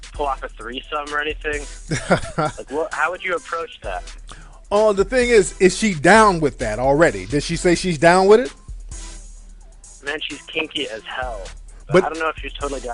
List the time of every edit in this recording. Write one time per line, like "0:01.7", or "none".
0:08.3